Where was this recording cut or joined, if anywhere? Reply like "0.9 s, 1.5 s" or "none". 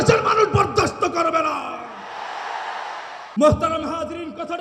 3.2 s